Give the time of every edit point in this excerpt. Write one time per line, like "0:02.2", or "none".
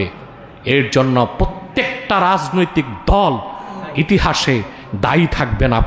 none